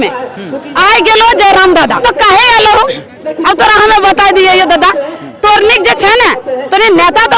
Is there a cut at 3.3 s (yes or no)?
no